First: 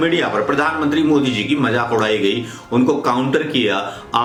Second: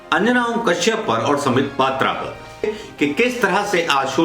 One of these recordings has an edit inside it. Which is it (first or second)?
second